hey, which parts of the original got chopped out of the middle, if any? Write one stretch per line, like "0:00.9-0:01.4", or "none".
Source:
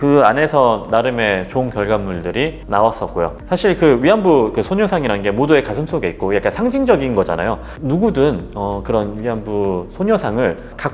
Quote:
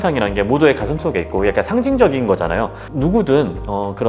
none